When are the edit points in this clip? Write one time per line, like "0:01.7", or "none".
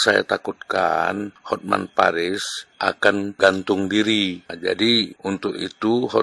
0:01.3
0:03.0
0:04.5
0:05.1